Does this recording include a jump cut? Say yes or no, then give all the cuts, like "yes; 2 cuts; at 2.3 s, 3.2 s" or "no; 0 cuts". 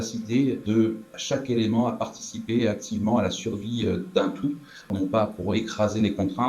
yes; 2 cuts; at 0.8 s, 4.9 s